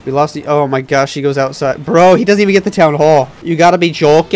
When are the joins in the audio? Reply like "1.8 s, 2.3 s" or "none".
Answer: 3.4 s